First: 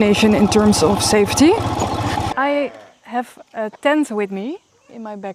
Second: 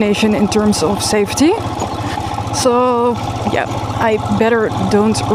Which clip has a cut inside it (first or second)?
first